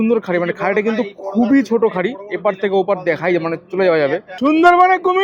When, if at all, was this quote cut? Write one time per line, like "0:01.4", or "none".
0:04.3